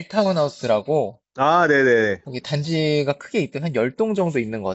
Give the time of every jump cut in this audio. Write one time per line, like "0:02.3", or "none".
none